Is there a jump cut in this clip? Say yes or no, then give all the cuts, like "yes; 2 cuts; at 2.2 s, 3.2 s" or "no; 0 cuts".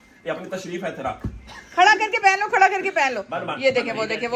no; 0 cuts